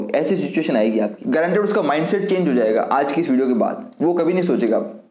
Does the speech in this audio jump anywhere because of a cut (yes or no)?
yes